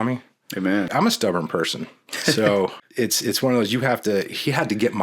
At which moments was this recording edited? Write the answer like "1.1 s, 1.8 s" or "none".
0.9 s, 2.8 s

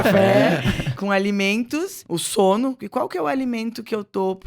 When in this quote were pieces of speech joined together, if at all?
1.0 s, 2.0 s, 2.8 s

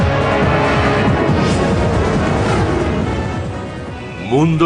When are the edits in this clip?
3.4 s

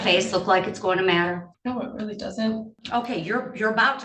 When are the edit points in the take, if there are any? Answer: 1.5 s, 2.8 s

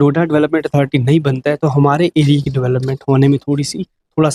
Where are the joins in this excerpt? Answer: none

